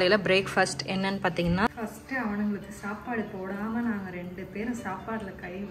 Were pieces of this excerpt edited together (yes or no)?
yes